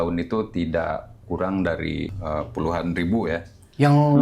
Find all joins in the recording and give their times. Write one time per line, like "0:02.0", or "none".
0:02.2